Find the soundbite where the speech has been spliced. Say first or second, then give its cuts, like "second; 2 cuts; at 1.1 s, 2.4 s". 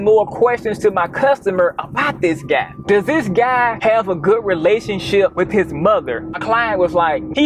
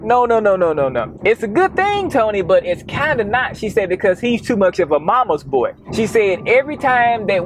first; 2 cuts; at 3.7 s, 5.3 s